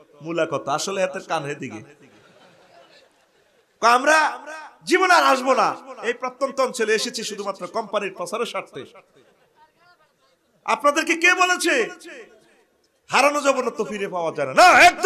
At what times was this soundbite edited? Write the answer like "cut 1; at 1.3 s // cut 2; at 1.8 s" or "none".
none